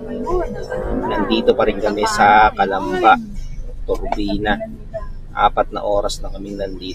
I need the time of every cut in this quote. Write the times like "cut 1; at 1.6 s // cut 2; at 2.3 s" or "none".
none